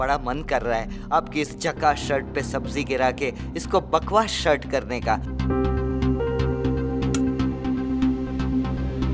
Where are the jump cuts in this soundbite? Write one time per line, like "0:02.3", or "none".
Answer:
none